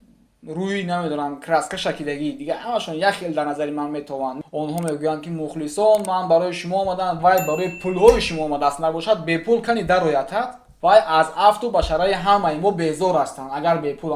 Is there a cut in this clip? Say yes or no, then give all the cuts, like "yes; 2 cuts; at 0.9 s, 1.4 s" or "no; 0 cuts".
yes; 2 cuts; at 4.4 s, 10.6 s